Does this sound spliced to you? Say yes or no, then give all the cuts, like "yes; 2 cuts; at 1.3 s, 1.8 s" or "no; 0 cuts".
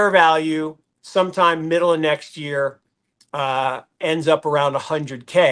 no; 0 cuts